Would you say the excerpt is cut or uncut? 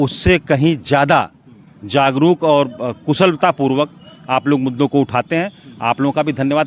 uncut